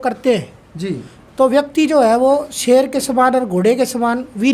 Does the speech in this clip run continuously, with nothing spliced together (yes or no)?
yes